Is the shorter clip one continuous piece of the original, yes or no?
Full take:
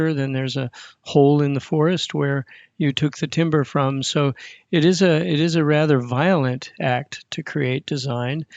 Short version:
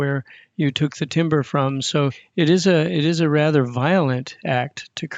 no